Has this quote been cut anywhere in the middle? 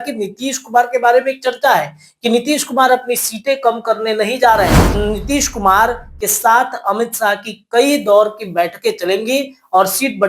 yes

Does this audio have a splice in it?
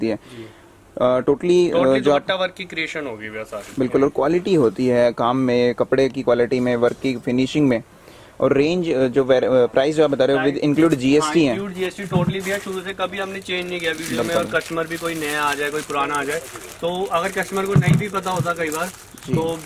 no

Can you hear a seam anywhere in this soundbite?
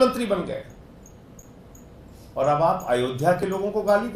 no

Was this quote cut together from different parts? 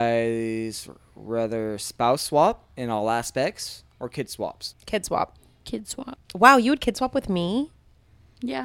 yes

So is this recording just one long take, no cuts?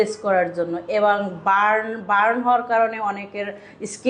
yes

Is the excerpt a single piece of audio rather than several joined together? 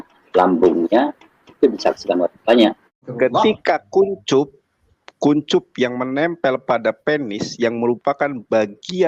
no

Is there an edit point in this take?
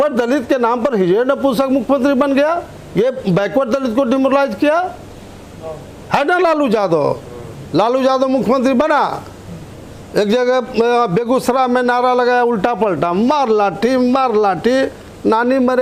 no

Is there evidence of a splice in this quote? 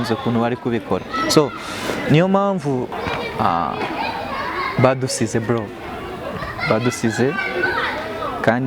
yes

